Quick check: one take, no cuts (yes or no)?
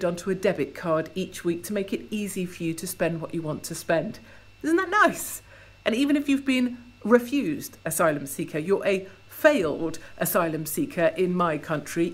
yes